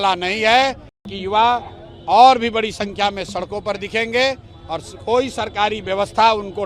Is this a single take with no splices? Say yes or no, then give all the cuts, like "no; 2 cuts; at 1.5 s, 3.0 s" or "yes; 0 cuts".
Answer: no; 1 cut; at 1.1 s